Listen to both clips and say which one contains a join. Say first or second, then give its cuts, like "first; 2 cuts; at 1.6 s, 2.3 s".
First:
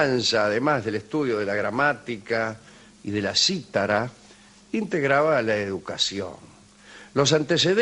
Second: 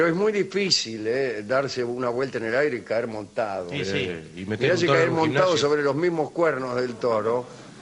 second; 1 cut; at 2.5 s